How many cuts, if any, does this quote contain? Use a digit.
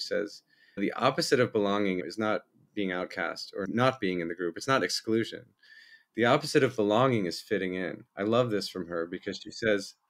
3